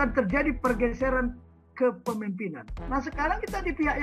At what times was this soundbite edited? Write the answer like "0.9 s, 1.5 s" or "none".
2.8 s

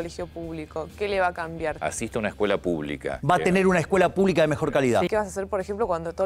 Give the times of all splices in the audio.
1.8 s, 3.1 s, 5.1 s

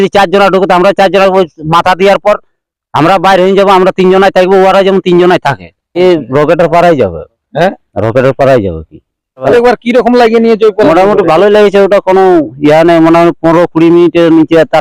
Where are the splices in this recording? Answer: 6.0 s, 9.5 s

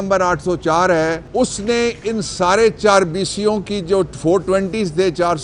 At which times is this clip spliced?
1.2 s

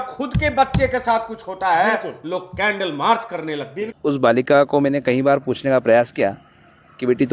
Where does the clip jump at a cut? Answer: 3.8 s

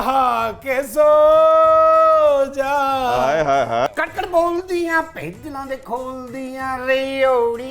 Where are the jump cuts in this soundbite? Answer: 3.9 s

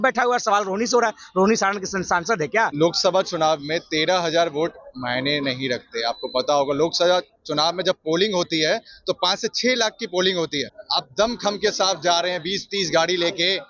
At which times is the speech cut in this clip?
2.7 s, 10.8 s

